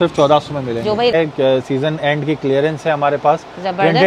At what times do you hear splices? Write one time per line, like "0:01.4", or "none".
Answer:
0:01.1